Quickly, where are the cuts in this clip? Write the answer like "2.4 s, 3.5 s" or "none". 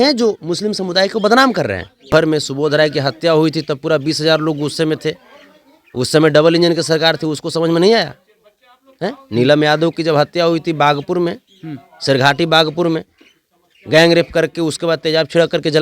2.1 s